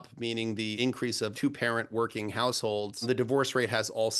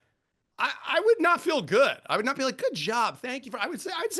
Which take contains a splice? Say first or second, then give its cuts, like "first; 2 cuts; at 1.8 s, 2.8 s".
first; 2 cuts; at 0.8 s, 3.0 s